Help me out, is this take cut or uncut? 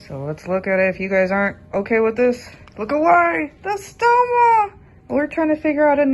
uncut